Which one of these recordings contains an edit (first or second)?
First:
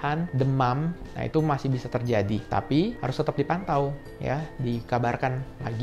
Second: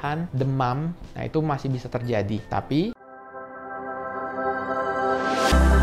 second